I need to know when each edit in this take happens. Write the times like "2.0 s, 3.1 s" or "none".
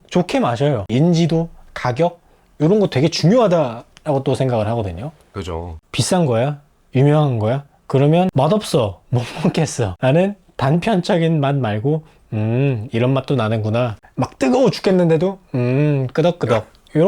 0.9 s, 5.6 s, 8.3 s, 9.9 s, 14.0 s

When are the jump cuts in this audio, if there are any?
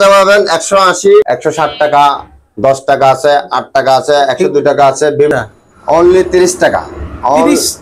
1.3 s, 5.3 s

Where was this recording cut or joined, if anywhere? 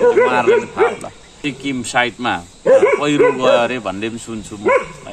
1.5 s

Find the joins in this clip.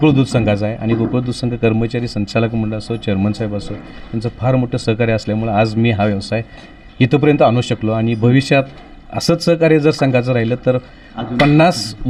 none

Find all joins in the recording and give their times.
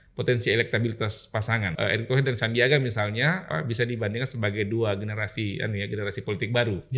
1.7 s, 3.4 s

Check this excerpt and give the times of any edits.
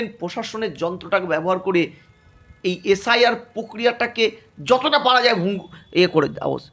none

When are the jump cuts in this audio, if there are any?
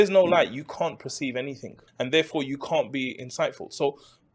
1.8 s

